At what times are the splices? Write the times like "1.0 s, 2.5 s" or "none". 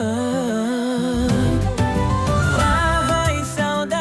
none